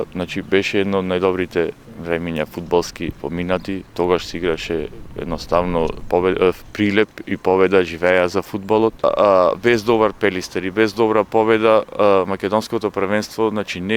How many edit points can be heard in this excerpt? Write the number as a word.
one